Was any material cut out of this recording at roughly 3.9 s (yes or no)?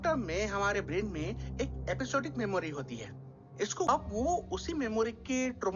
yes